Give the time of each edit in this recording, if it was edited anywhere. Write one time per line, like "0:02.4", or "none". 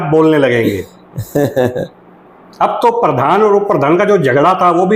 none